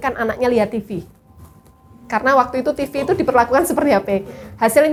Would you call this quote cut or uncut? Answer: uncut